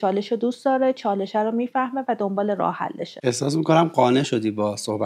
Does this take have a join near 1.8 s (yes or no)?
no